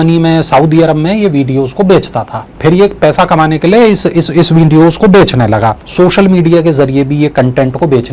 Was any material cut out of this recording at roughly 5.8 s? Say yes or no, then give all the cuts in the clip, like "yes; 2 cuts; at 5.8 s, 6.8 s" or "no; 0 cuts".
yes; 2 cuts; at 2.5 s, 5.8 s